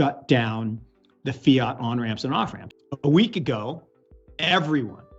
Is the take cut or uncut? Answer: cut